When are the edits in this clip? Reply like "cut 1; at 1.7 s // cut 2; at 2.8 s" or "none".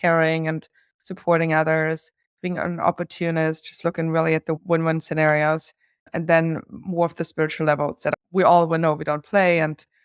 cut 1; at 4.6 s // cut 2; at 8.1 s